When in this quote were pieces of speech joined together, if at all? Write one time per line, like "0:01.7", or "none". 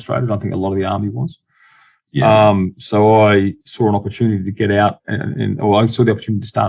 none